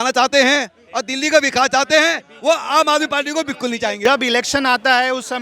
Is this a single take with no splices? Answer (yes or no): no